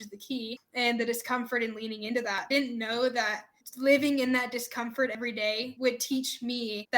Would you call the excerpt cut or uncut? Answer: cut